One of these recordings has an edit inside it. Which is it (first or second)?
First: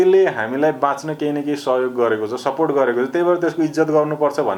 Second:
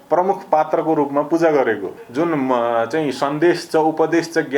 second